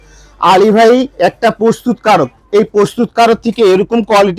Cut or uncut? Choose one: uncut